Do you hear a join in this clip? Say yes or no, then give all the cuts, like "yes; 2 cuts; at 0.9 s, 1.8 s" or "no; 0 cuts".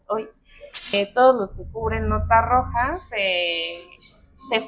yes; 1 cut; at 0.9 s